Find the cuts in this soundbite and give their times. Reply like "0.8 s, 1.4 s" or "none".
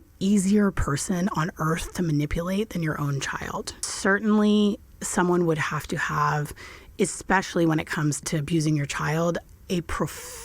3.9 s, 8.3 s